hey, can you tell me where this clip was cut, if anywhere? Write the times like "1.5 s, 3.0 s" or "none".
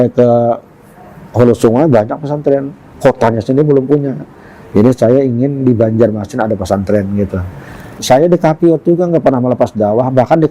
7.9 s